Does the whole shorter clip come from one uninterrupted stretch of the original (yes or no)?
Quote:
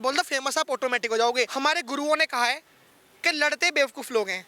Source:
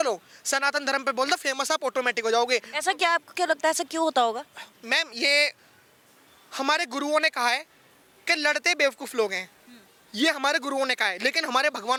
no